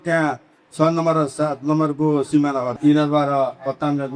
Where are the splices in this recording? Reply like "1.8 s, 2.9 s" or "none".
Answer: 2.7 s